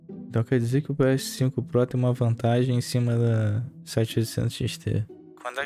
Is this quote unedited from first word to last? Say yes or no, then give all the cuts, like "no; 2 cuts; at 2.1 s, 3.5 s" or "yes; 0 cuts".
yes; 0 cuts